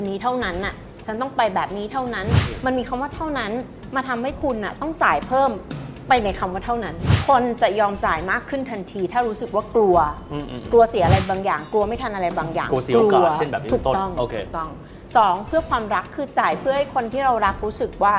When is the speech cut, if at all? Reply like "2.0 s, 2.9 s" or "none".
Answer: 7.1 s